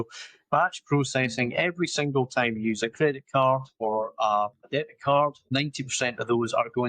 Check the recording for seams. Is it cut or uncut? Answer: cut